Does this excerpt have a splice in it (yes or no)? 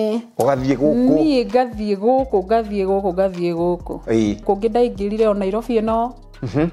yes